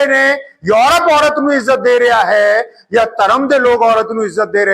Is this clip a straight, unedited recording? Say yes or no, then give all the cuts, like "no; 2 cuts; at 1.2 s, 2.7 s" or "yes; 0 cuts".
yes; 0 cuts